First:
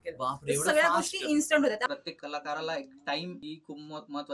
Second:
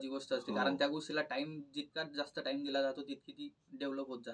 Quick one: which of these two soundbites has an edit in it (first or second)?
first